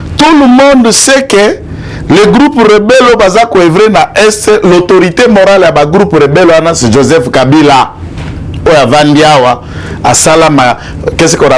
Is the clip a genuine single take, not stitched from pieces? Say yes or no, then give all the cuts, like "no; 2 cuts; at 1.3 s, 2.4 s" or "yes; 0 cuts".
yes; 0 cuts